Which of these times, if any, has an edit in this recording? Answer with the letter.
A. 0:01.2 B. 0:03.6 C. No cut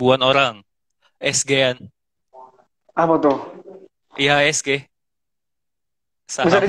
A